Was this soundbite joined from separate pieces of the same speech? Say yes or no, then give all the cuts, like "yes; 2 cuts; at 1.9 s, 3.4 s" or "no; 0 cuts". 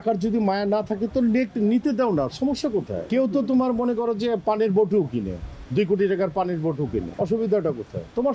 yes; 2 cuts; at 3.0 s, 7.1 s